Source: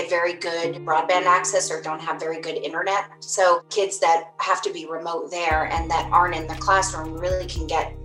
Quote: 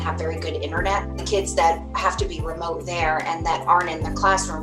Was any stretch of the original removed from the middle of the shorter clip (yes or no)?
yes